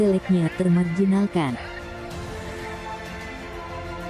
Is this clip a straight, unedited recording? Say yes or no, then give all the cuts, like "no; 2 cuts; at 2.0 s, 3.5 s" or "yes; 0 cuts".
yes; 0 cuts